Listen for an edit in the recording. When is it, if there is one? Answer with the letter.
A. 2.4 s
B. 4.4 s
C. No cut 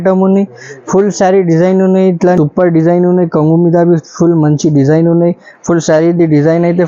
A